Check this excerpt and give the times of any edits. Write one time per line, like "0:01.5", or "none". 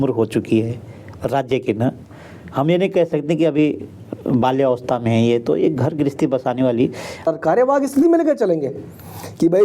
0:07.3